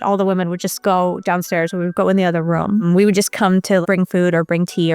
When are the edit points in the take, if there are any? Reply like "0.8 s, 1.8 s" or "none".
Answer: 2.8 s